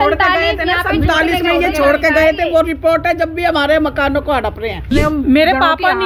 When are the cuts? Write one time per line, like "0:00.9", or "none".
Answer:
0:04.8

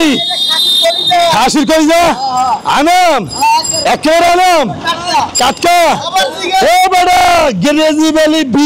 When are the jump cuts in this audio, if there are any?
none

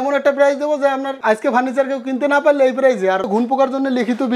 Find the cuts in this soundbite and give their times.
0:01.1
0:03.3

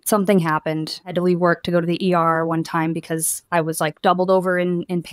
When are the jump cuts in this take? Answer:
0:01.1

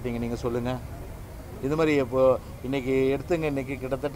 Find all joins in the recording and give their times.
none

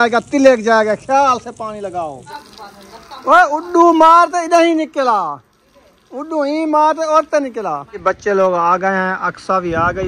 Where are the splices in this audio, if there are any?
0:02.4
0:08.0

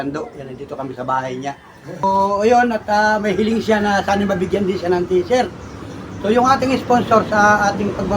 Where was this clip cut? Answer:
0:02.0

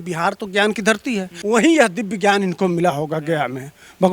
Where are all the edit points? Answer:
0:01.3

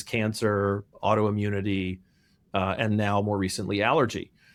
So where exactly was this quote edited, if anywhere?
none

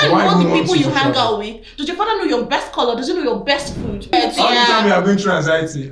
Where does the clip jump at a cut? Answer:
0:04.1

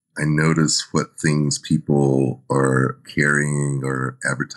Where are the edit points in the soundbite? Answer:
none

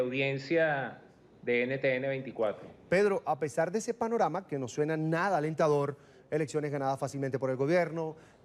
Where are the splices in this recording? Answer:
0:05.1

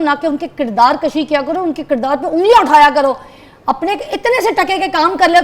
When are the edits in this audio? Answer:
none

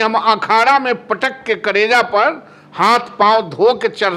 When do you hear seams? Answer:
none

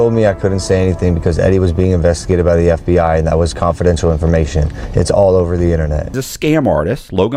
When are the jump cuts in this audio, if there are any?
0:06.2

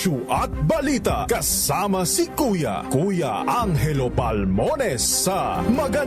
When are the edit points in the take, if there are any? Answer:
none

